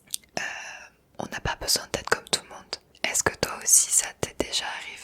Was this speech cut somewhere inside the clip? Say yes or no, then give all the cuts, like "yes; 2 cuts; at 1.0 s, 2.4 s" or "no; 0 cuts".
yes; 1 cut; at 2.8 s